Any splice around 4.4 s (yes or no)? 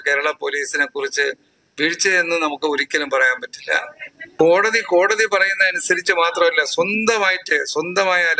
yes